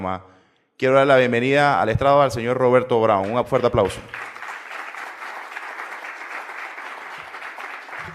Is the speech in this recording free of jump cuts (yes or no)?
no